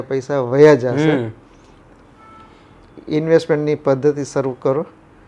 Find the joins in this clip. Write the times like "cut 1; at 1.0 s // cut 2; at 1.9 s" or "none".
none